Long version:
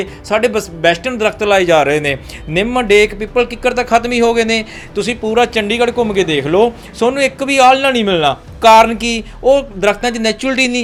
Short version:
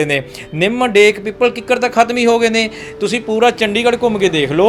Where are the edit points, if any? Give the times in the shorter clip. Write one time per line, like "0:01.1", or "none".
none